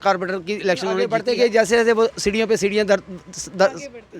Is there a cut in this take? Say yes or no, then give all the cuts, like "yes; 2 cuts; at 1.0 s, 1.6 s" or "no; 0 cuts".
yes; 1 cut; at 1.2 s